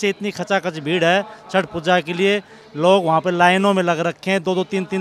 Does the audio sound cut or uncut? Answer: uncut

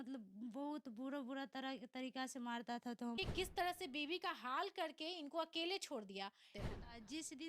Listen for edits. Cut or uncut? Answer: cut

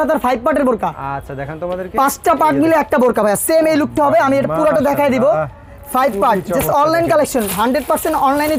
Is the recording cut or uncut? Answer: uncut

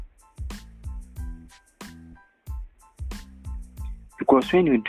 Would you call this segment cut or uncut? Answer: cut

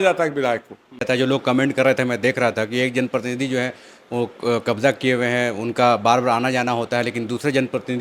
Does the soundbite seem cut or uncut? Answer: cut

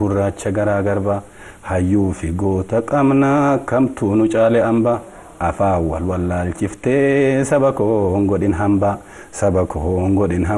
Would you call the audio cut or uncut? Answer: uncut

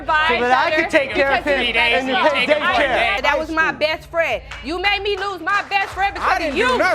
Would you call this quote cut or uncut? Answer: cut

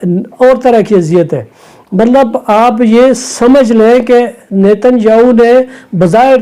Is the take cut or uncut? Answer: uncut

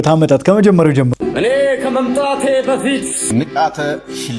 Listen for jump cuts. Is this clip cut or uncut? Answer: cut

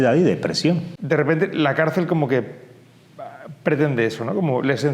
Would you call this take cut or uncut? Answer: cut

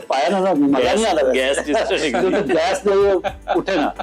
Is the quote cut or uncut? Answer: uncut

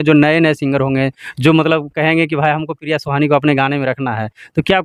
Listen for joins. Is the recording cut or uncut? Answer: uncut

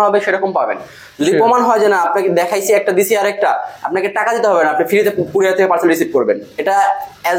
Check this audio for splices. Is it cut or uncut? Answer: uncut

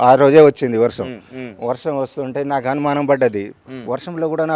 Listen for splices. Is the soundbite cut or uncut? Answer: uncut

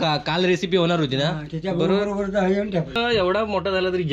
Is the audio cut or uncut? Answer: cut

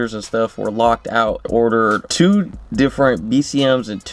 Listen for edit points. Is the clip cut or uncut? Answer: cut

